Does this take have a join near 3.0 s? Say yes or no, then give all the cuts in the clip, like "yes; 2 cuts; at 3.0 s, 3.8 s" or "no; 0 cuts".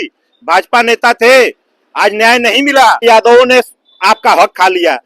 yes; 1 cut; at 3.0 s